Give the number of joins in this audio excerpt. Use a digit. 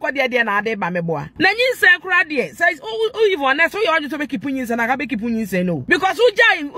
2